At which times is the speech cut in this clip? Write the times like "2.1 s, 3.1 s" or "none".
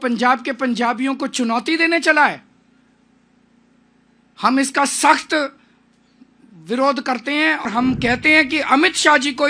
7.6 s